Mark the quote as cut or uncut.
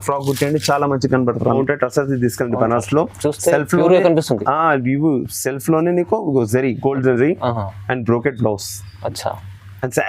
cut